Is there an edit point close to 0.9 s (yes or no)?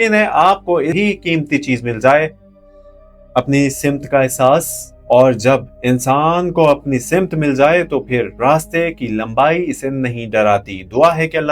yes